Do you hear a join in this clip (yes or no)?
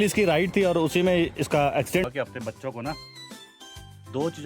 yes